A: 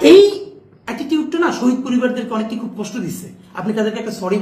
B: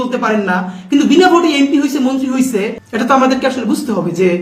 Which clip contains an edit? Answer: B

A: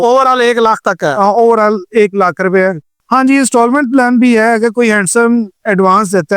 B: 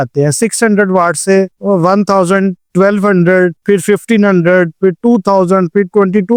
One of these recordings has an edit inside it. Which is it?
A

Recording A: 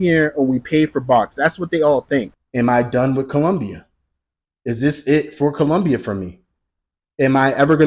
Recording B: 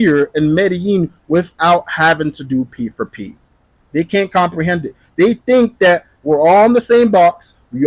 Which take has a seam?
A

